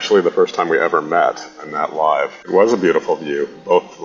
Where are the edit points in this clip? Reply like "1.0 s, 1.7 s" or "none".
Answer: 2.4 s